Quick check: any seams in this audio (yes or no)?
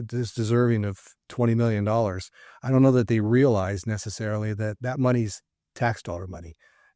no